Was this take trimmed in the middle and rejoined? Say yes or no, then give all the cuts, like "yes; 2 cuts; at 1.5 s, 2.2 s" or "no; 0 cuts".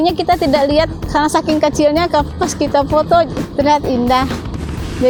no; 0 cuts